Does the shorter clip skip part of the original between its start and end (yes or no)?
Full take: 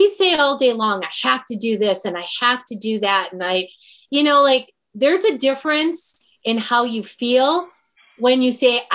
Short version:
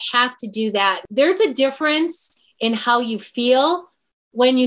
yes